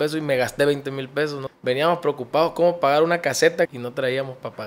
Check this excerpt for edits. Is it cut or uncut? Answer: cut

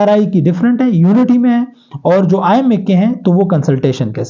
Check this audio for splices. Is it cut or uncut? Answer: uncut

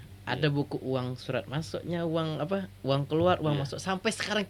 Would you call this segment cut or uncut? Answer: uncut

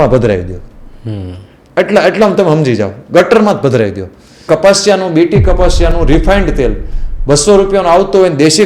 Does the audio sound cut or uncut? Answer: cut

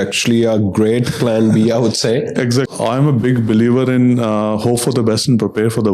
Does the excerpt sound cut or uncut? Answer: cut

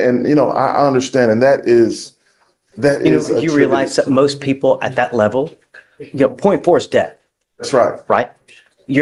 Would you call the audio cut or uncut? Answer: uncut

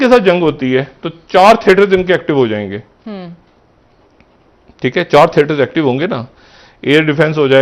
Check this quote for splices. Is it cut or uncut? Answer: uncut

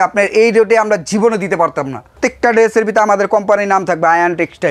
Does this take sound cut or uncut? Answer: cut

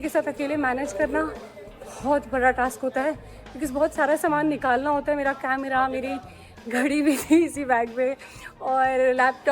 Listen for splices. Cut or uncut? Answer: uncut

